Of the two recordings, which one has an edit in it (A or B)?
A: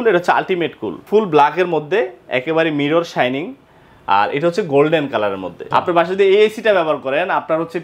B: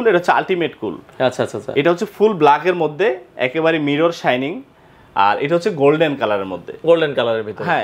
A